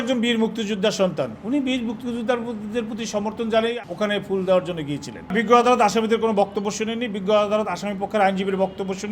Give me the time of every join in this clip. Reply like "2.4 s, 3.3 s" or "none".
3.7 s, 5.2 s